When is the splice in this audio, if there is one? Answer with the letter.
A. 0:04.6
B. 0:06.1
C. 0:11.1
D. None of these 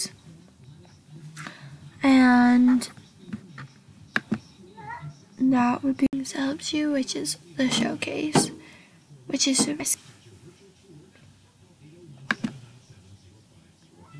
B